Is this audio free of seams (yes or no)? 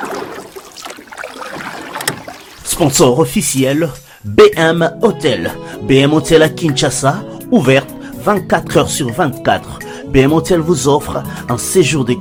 yes